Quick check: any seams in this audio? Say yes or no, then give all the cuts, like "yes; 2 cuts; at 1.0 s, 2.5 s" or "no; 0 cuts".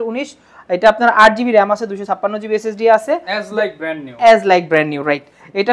no; 0 cuts